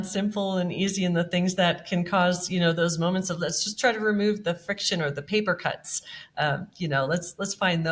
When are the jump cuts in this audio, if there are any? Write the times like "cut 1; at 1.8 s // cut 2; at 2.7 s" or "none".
none